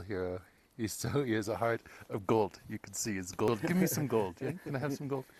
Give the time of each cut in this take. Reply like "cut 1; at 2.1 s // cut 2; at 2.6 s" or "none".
cut 1; at 3.5 s